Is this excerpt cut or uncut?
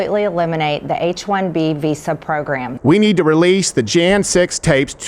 cut